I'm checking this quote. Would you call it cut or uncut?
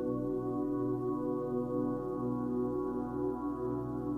uncut